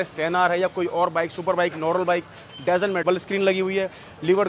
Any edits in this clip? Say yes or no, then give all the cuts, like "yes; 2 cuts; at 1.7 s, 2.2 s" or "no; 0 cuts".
yes; 1 cut; at 3.0 s